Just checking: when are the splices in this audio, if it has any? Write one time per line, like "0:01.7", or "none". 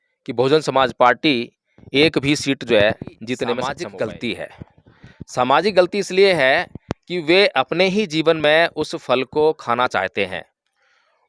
0:03.7